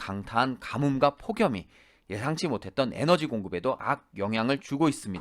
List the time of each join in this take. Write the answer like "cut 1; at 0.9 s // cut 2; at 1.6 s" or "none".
cut 1; at 3.8 s